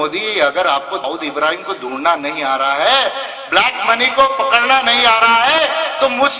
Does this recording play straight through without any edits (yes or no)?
no